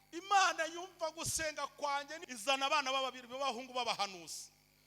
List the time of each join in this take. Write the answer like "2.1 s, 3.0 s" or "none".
2.2 s